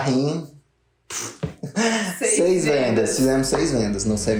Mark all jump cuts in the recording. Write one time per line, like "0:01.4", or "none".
none